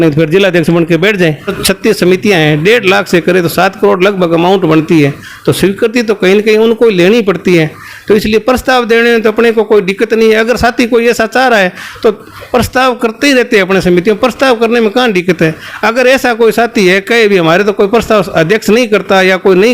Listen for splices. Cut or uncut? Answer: cut